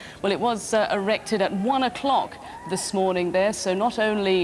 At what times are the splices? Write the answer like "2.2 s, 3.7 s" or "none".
1.0 s